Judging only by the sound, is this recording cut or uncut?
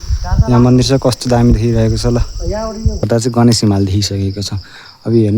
cut